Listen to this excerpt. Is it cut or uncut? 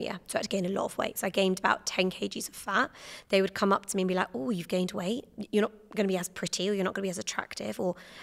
cut